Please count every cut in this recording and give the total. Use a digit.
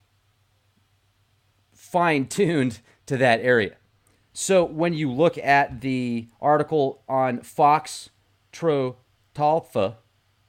0